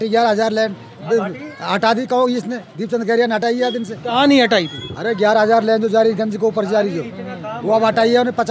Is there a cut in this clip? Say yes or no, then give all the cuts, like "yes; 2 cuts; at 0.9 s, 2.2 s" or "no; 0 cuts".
no; 0 cuts